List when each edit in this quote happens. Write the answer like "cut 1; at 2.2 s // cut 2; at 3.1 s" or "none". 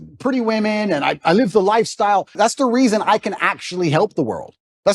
cut 1; at 2.3 s